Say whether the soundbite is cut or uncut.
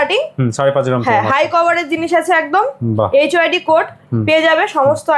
uncut